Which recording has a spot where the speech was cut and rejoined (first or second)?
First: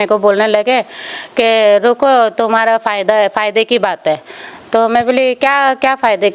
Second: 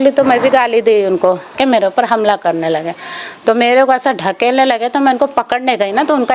second